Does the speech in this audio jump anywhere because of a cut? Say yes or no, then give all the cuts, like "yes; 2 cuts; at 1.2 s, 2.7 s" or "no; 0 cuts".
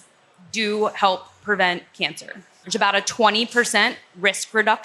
yes; 1 cut; at 2.6 s